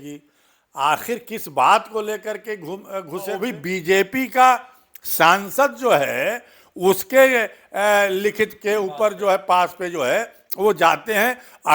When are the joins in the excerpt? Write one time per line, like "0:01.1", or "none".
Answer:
0:03.4